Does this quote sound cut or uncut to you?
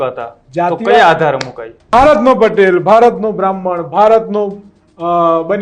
cut